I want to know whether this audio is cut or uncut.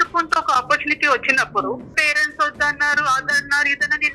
cut